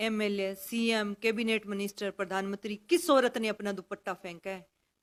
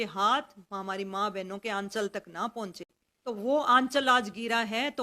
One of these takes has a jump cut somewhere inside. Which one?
second; 1 cut; at 3.1 s

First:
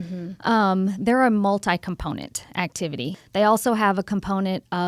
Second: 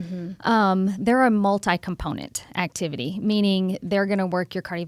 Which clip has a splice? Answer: first; 1 cut; at 3.1 s

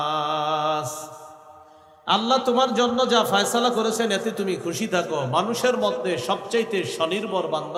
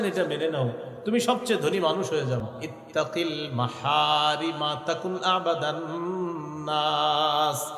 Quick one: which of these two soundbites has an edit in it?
second; 1 cut; at 2.4 s

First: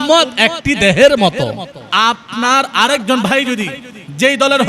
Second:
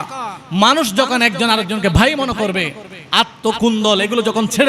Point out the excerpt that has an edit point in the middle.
first; 1 cut; at 1.8 s

